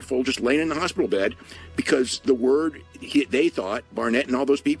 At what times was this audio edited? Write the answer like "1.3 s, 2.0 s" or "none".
none